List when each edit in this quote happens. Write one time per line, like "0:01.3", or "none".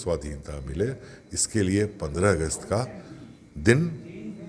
none